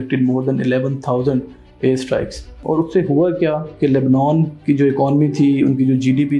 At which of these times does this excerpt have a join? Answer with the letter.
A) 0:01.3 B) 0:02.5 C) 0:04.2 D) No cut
B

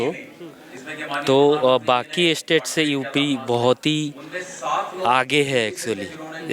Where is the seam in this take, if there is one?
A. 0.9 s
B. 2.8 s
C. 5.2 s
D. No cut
D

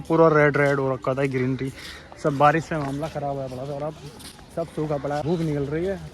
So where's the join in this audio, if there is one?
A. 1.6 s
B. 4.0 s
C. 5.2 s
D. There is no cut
C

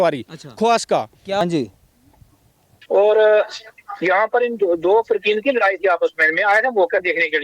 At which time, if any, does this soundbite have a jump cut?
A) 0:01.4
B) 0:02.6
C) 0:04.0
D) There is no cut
A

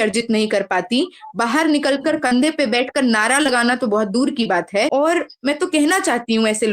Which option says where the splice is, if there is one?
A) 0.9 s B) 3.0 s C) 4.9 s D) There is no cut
C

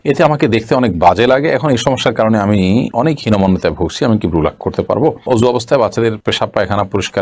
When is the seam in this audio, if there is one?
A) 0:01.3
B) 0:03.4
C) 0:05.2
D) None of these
C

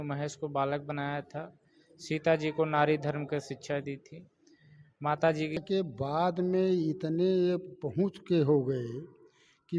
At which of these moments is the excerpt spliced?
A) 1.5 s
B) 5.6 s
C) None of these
B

